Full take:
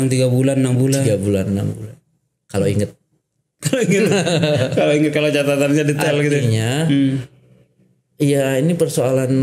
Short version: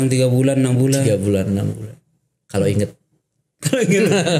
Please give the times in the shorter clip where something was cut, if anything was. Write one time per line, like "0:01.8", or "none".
none